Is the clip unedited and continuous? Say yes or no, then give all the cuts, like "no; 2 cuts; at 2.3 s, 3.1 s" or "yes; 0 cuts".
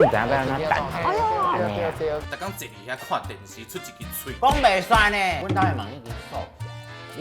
no; 2 cuts; at 2.3 s, 5.4 s